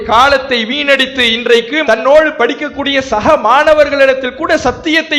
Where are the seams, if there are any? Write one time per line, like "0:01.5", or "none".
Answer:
none